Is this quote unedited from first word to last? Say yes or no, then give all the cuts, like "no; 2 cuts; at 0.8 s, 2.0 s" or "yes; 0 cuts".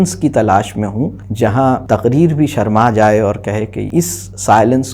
no; 3 cuts; at 1.2 s, 1.8 s, 3.8 s